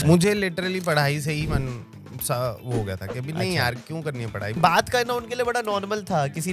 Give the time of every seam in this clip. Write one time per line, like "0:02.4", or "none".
0:04.5